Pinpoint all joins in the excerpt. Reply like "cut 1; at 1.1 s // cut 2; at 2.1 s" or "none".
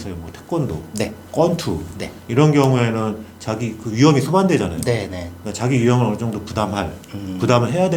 none